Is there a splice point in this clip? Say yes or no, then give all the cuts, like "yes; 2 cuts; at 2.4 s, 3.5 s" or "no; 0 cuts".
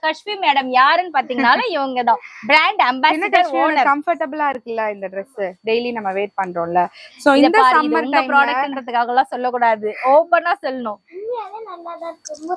no; 0 cuts